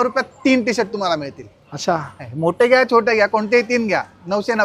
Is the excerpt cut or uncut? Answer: uncut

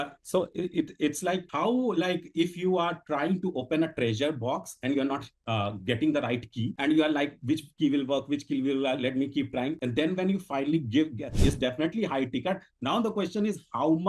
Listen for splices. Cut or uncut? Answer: cut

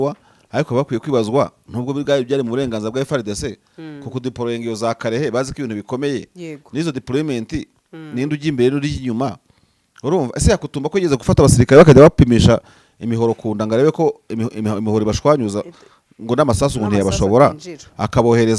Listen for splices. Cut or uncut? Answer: uncut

